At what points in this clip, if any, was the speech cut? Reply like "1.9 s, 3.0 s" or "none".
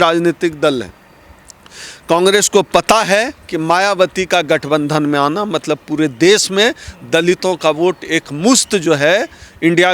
none